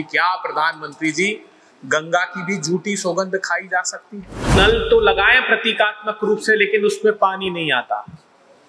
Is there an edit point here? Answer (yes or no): yes